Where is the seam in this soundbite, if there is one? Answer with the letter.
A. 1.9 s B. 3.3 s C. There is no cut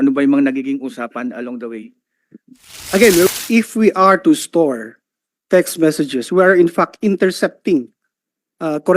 B